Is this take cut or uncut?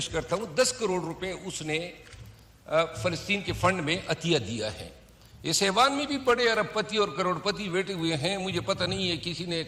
uncut